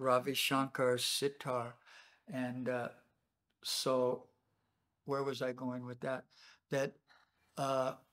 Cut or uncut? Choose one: uncut